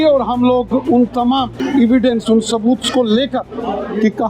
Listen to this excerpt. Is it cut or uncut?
cut